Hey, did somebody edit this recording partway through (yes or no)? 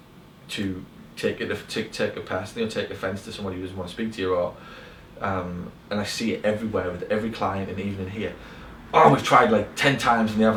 no